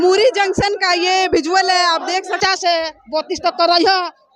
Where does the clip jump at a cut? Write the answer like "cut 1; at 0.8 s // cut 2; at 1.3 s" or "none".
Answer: cut 1; at 2.4 s